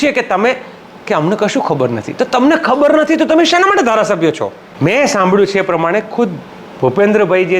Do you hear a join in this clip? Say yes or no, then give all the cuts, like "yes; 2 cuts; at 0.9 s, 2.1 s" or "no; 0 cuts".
yes; 1 cut; at 4.6 s